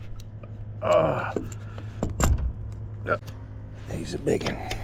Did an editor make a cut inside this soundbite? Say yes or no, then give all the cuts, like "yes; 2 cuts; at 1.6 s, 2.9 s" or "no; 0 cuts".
yes; 1 cut; at 3.2 s